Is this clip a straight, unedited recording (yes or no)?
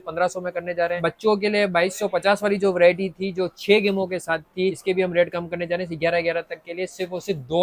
no